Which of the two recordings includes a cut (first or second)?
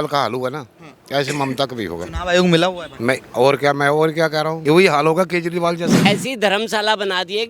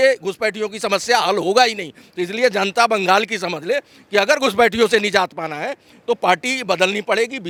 first